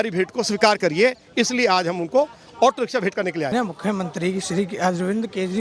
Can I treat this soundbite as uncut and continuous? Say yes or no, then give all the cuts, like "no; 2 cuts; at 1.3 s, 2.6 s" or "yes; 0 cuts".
no; 1 cut; at 3.5 s